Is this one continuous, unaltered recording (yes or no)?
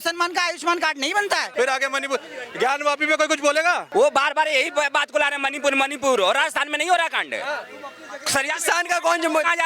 no